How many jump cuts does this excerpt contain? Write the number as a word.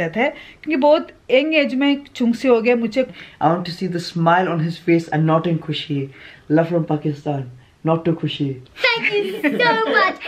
three